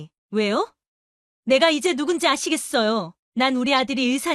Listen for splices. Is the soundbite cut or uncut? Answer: cut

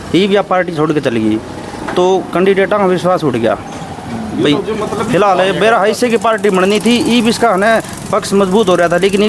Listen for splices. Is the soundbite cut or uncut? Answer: uncut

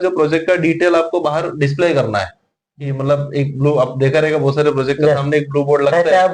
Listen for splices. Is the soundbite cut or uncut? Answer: uncut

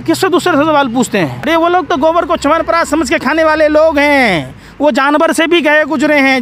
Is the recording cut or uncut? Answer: cut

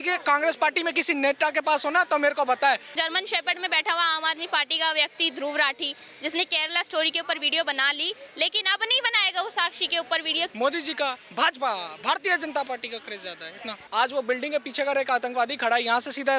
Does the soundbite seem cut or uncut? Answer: cut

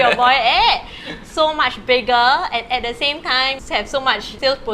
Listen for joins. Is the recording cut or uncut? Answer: cut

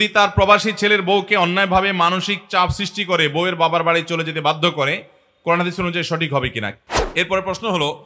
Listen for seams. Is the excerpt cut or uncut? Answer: cut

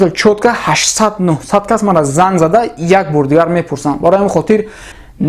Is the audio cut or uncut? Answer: uncut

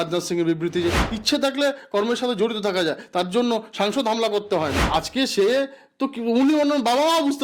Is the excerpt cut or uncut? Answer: cut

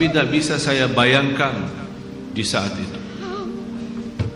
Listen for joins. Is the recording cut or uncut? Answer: uncut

